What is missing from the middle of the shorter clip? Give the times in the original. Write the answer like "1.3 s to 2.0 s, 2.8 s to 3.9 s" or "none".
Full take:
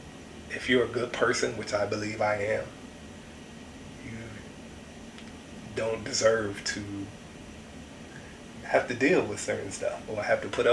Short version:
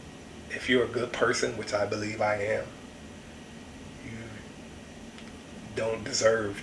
none